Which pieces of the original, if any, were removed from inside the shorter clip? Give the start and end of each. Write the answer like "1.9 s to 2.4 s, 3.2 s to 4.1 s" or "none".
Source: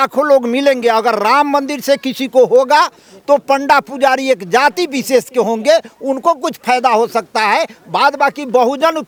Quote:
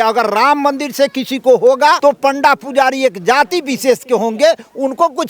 2.9 s to 3.2 s